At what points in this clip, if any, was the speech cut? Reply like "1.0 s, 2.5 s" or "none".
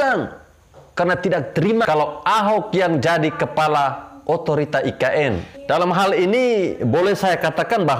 1.9 s, 5.6 s